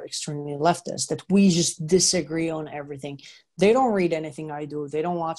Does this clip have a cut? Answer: no; 0 cuts

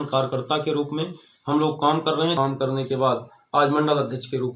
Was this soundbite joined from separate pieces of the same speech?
yes; 1 cut; at 2.3 s

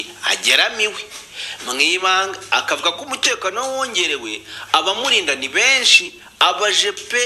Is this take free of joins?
yes; 0 cuts

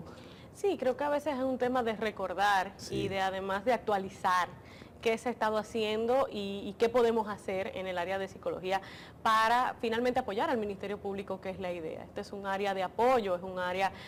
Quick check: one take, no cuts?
yes; 0 cuts

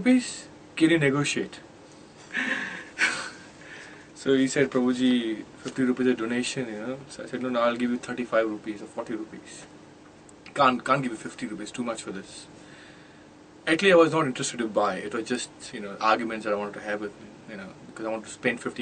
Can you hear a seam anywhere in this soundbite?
no; 0 cuts

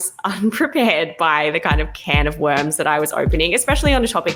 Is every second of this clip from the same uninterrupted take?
yes; 0 cuts

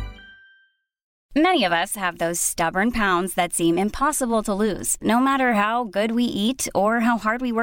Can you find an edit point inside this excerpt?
yes; 1 cut; at 1.2 s

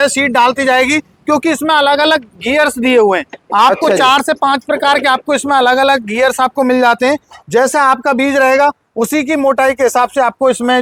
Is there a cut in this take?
no; 0 cuts

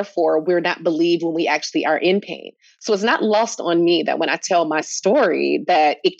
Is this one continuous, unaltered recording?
yes; 0 cuts

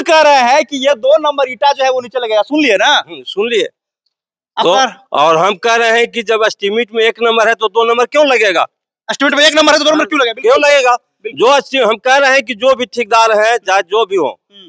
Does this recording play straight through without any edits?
yes; 0 cuts

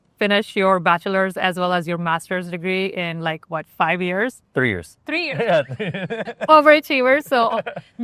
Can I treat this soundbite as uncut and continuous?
yes; 0 cuts

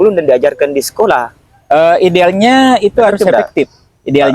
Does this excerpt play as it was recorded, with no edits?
yes; 0 cuts

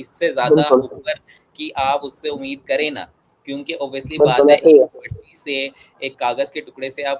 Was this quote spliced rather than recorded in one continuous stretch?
no; 0 cuts

